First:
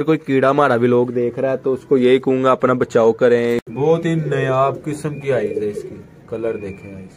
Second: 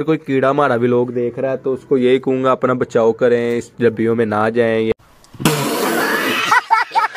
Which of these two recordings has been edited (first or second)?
first